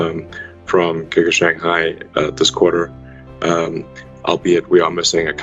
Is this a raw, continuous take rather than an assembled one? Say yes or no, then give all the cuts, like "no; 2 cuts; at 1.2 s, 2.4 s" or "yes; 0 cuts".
yes; 0 cuts